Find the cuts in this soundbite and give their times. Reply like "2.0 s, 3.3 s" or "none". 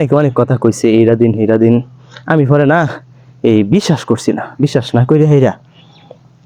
none